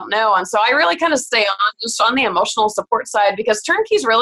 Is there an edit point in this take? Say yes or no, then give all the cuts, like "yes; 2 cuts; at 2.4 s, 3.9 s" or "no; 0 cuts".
no; 0 cuts